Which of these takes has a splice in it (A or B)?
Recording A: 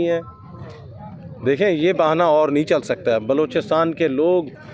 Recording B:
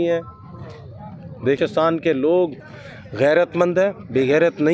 B